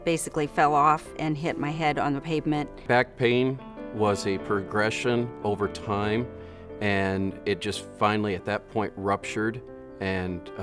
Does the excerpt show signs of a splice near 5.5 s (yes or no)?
no